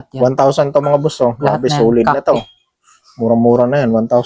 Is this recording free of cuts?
yes; 0 cuts

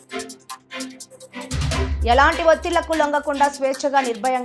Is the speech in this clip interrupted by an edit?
yes; 1 cut; at 1.9 s

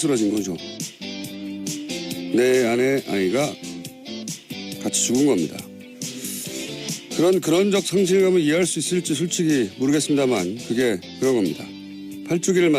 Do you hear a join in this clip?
yes; 1 cut; at 1.4 s

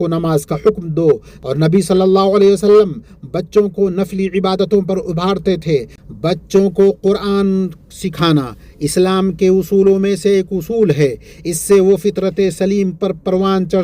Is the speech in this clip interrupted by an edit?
yes; 2 cuts; at 1.3 s, 6.0 s

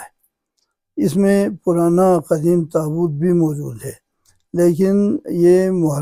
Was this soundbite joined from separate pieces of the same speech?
no; 0 cuts

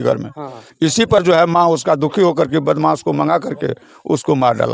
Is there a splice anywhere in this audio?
no; 0 cuts

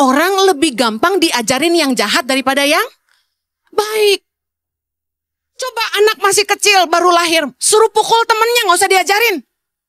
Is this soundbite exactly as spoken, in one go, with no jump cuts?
yes; 0 cuts

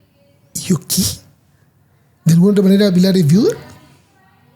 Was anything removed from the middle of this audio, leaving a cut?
no; 0 cuts

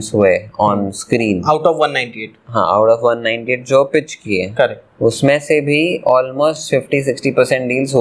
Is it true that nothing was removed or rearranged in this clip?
yes; 0 cuts

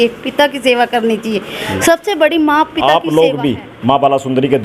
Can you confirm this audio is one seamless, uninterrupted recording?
no; 1 cut; at 2.7 s

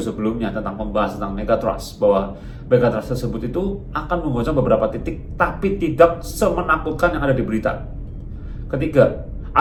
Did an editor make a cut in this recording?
no; 0 cuts

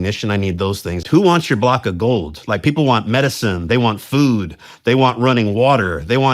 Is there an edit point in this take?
yes; 1 cut; at 0.9 s

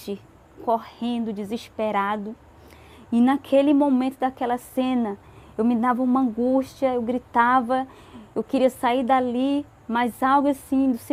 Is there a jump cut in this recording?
no; 0 cuts

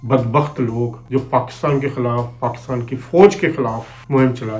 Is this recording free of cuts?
no; 1 cut; at 1.0 s

